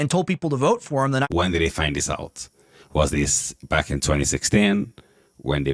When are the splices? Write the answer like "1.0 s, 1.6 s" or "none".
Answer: 1.3 s